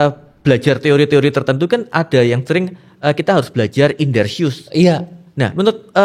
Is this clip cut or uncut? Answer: uncut